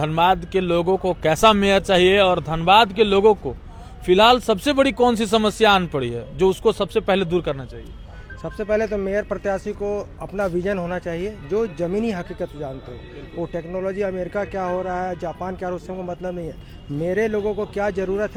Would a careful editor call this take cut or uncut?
uncut